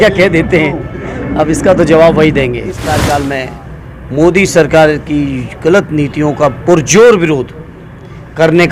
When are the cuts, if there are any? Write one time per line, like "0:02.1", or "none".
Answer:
0:02.8